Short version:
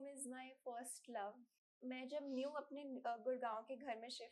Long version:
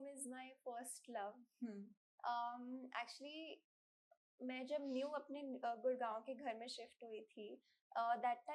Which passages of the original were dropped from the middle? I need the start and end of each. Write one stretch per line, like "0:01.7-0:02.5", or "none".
0:01.5-0:04.0